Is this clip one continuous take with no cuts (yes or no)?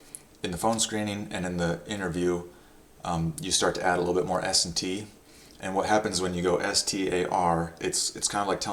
yes